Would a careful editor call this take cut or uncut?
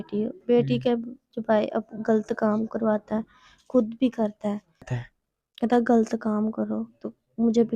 cut